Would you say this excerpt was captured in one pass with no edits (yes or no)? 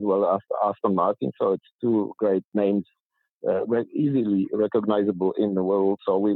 yes